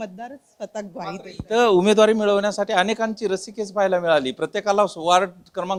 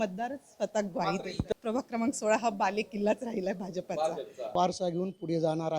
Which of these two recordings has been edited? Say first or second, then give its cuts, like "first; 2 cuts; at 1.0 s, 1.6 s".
second; 2 cuts; at 1.5 s, 4.5 s